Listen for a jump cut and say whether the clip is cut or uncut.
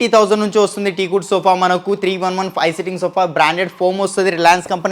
uncut